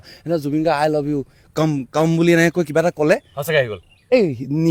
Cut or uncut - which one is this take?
uncut